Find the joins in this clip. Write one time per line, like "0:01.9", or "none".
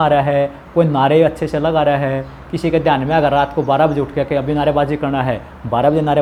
none